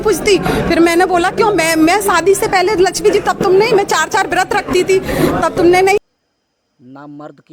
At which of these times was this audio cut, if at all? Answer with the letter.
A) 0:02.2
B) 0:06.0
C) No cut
B